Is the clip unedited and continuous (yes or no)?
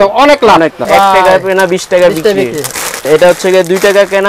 no